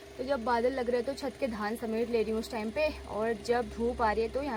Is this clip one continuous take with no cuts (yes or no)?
yes